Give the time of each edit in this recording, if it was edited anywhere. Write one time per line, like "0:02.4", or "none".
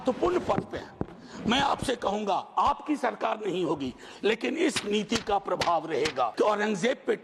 0:06.3